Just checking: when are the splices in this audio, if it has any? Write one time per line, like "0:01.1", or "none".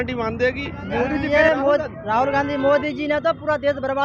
0:01.2